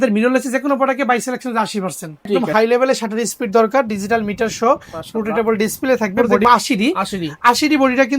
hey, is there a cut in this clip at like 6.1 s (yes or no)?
yes